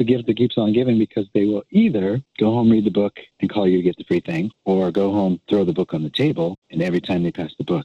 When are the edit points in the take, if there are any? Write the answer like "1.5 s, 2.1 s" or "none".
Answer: 2.2 s, 3.2 s, 4.5 s, 6.6 s